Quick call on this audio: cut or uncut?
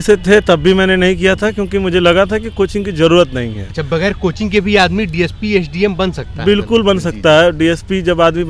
uncut